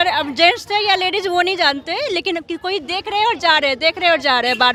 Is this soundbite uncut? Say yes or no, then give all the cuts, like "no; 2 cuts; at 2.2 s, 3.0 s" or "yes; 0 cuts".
yes; 0 cuts